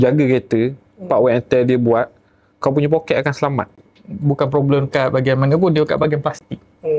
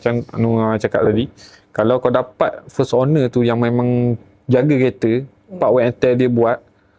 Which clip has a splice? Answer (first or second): first